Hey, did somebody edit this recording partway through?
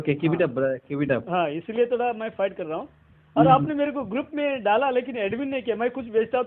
no; 0 cuts

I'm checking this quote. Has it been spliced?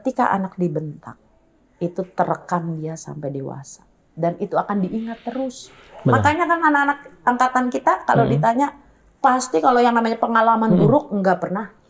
no; 0 cuts

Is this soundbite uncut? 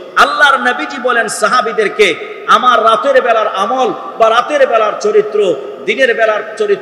yes; 0 cuts

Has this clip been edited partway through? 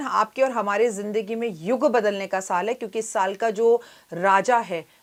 no; 0 cuts

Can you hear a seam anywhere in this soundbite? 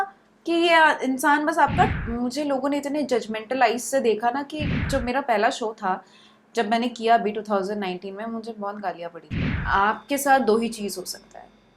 yes; 3 cuts; at 1.9 s, 4.9 s, 9.5 s

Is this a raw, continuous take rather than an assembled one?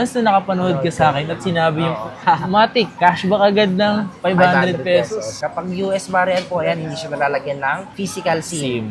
no; 1 cut; at 5.3 s

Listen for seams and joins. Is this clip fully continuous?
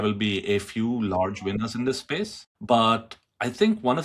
no; 1 cut; at 2.5 s

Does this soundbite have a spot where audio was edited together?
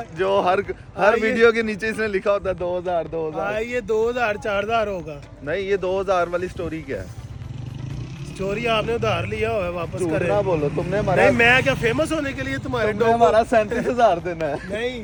no; 0 cuts

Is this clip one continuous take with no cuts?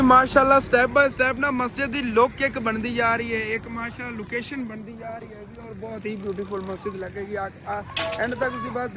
yes; 0 cuts

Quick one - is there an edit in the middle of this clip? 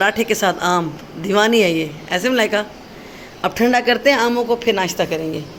no; 0 cuts

